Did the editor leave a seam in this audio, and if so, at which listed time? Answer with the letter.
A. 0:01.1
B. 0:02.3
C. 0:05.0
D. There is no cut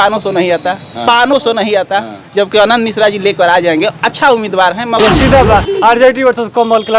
C